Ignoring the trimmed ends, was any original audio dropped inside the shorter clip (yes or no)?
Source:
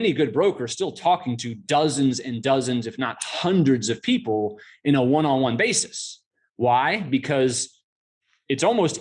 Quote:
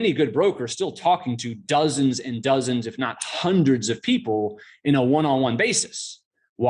no